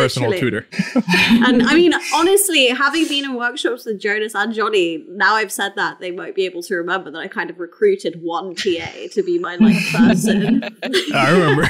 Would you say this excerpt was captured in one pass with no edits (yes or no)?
yes